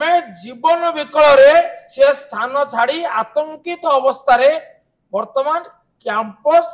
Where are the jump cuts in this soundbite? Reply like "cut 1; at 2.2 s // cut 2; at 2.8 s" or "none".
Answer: none